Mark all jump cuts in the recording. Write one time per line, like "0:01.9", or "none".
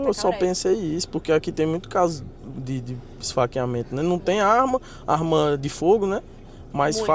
none